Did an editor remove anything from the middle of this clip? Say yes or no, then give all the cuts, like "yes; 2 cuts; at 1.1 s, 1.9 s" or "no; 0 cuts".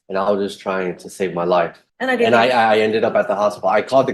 yes; 1 cut; at 1.8 s